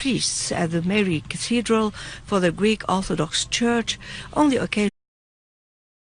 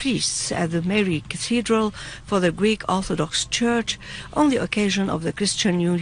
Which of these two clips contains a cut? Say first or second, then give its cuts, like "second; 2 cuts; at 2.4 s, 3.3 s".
second; 1 cut; at 4.9 s